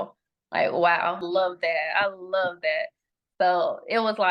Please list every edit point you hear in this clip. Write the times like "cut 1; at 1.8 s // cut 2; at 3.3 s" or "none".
cut 1; at 1.2 s